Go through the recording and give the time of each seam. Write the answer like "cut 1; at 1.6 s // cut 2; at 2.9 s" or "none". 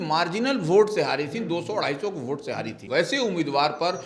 cut 1; at 2.9 s